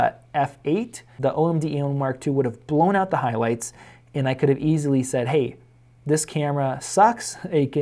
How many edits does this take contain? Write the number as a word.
one